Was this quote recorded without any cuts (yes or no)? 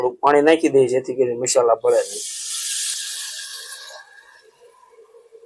yes